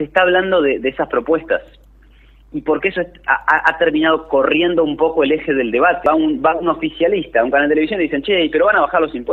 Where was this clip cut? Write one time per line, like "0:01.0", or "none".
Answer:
0:06.0